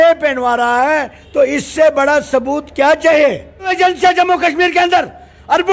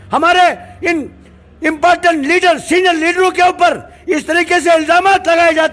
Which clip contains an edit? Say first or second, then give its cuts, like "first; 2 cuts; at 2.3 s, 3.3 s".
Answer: first; 1 cut; at 3.7 s